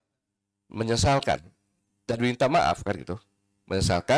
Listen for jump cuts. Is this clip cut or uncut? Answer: uncut